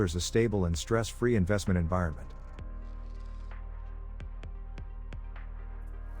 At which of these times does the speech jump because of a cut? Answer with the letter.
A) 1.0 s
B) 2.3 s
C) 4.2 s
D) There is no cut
B